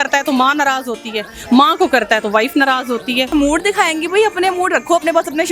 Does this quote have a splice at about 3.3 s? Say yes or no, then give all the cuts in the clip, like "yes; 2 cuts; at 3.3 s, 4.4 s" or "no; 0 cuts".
yes; 1 cut; at 3.3 s